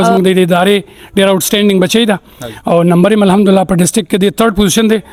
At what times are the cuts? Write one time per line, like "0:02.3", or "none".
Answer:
none